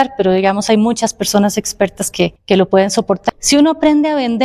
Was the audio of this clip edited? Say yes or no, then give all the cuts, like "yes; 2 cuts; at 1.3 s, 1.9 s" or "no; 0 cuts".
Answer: yes; 2 cuts; at 2.4 s, 3.2 s